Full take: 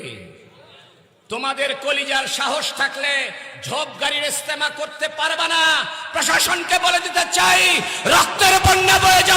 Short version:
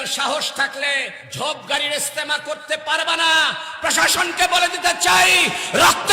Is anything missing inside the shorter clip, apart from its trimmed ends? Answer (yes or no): yes